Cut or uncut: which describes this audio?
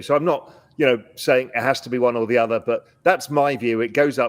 uncut